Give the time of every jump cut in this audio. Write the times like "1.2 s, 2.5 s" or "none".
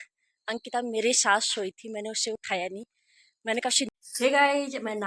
3.9 s